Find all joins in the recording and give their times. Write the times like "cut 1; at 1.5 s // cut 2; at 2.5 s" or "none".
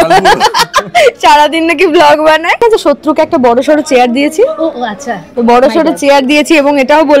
cut 1; at 2.6 s